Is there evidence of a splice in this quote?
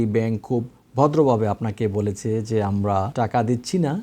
yes; 1 cut; at 3.1 s

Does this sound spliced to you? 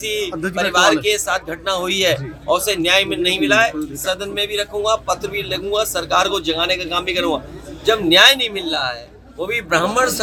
no; 0 cuts

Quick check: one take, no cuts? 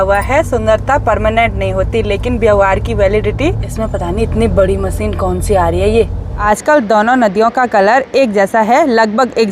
no; 2 cuts; at 3.7 s, 6.3 s

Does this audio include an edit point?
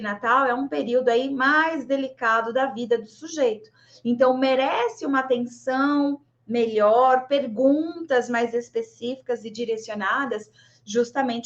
no; 0 cuts

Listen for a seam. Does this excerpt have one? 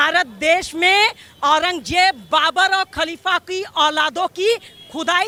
no; 0 cuts

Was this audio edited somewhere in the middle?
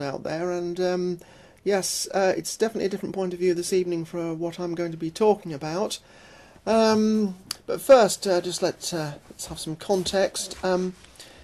yes; 1 cut; at 6.8 s

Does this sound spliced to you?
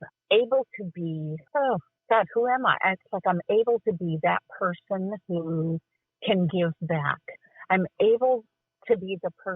yes; 1 cut; at 1.3 s

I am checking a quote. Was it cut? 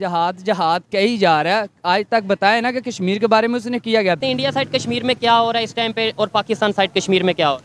yes; 1 cut; at 4.2 s

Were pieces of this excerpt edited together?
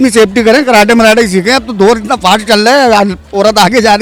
no; 0 cuts

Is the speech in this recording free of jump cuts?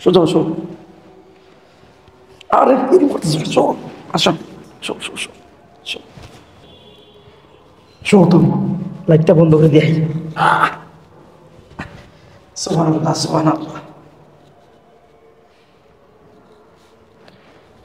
yes; 0 cuts

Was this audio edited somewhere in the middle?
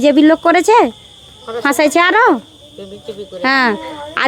no; 0 cuts

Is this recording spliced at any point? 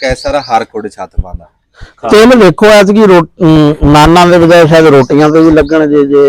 yes; 1 cut; at 1.7 s

